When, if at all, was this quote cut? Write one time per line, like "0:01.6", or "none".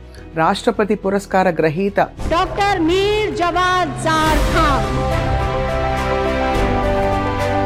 none